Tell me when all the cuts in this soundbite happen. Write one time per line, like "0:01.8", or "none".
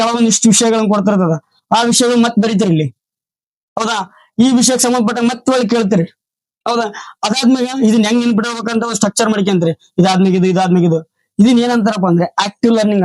none